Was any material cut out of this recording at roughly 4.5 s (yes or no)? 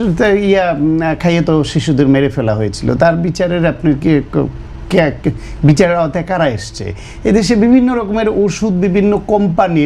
no